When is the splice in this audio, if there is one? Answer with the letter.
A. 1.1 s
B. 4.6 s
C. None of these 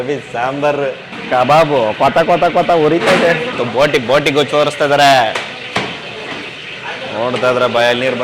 A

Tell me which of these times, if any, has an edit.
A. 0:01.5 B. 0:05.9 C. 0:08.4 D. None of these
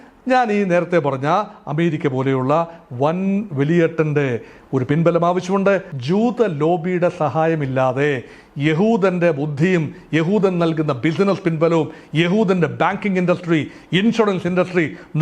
B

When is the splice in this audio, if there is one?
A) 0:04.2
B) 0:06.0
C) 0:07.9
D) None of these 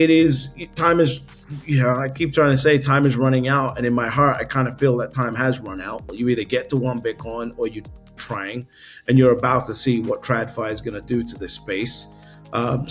B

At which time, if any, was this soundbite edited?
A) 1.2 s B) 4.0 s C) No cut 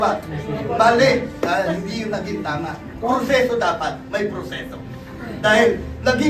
C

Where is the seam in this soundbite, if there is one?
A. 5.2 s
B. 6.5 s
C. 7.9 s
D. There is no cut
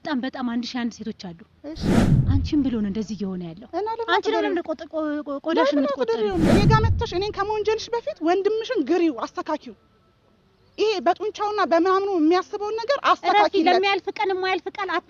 B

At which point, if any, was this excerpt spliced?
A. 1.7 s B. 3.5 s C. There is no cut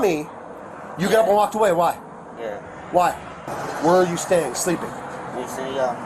B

